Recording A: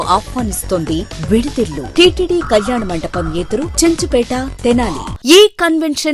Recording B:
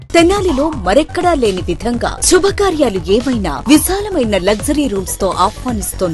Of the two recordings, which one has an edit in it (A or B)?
A